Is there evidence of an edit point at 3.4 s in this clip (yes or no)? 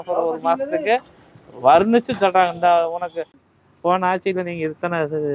yes